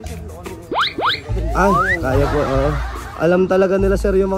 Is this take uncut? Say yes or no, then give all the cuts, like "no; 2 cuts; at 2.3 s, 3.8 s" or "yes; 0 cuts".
yes; 0 cuts